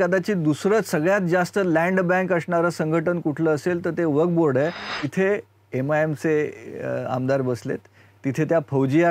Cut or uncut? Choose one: cut